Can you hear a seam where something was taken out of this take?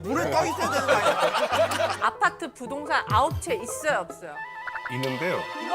yes; 1 cut; at 2.0 s

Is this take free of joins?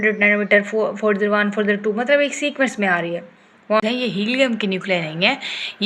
no; 1 cut; at 3.8 s

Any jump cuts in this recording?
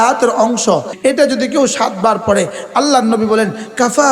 yes; 1 cut; at 0.9 s

